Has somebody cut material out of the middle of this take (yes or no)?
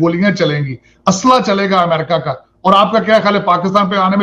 no